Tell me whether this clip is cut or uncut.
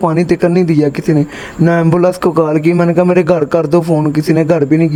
uncut